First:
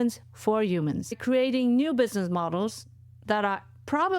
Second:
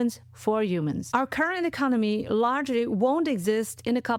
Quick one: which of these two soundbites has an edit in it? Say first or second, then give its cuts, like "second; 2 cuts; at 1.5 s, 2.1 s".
first; 1 cut; at 1.1 s